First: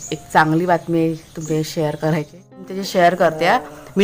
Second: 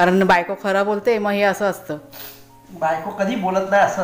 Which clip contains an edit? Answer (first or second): first